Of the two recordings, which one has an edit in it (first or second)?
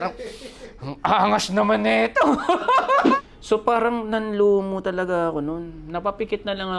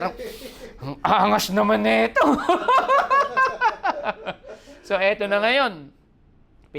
first